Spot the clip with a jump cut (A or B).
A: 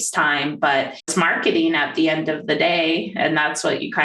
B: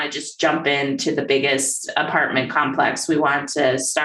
A